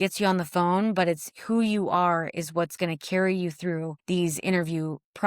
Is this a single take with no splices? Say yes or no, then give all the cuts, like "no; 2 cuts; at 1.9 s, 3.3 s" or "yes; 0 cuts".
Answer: no; 1 cut; at 3.9 s